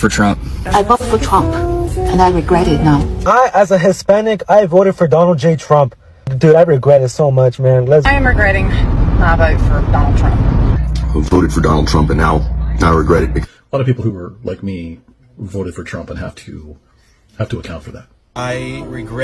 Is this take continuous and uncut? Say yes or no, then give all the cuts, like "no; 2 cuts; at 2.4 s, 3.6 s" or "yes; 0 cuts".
yes; 0 cuts